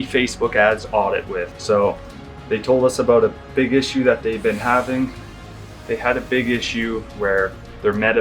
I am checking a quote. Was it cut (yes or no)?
no